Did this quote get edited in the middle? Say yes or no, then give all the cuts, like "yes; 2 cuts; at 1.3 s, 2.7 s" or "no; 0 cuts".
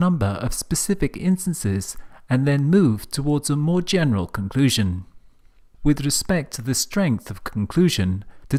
no; 0 cuts